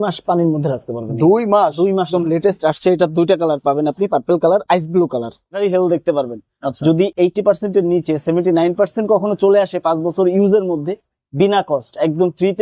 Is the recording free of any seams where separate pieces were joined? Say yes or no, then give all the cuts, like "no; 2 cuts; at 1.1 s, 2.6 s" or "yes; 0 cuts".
no; 2 cuts; at 2.1 s, 5.6 s